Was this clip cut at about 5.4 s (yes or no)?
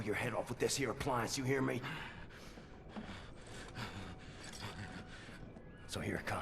no